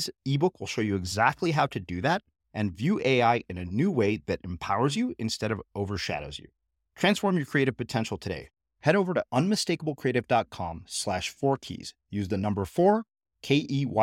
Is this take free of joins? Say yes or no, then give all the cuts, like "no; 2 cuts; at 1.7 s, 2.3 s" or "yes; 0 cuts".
yes; 0 cuts